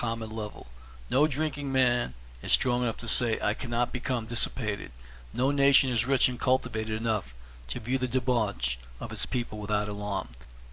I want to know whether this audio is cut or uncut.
cut